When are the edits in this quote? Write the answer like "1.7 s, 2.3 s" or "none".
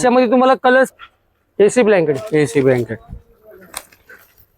0.9 s